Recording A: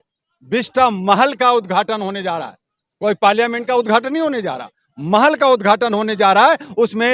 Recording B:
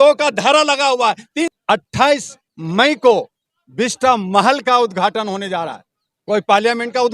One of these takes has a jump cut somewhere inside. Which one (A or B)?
B